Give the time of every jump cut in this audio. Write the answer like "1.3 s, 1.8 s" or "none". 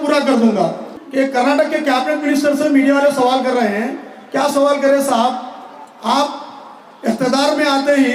1.0 s